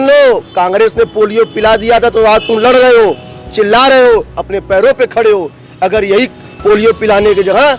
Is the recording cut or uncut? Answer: uncut